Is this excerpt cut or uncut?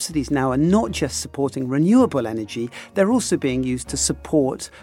uncut